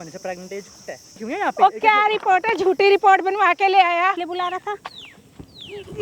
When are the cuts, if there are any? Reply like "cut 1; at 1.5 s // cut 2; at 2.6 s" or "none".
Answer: cut 1; at 1.2 s // cut 2; at 4.1 s